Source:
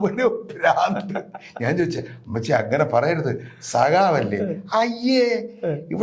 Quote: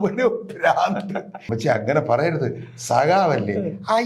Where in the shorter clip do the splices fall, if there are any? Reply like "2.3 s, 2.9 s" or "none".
1.4 s